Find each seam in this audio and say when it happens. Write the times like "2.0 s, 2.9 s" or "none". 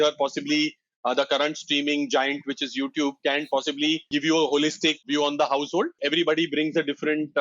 4.1 s, 5.0 s, 6.0 s